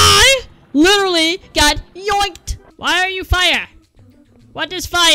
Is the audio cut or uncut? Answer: cut